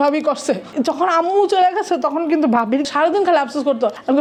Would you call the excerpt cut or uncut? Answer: uncut